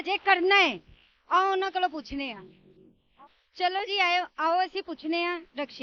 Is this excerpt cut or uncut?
uncut